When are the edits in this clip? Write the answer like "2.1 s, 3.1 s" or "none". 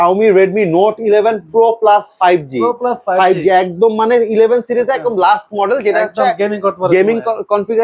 none